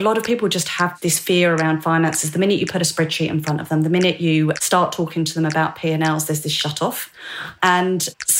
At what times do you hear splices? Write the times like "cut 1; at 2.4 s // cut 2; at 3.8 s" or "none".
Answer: cut 1; at 0.9 s